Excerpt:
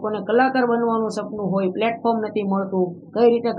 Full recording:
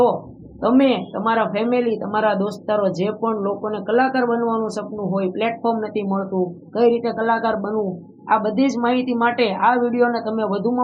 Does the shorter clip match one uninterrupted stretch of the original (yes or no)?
yes